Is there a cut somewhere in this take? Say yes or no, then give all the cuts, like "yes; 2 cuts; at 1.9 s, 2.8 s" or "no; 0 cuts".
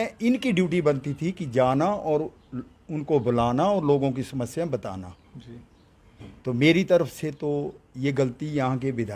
no; 0 cuts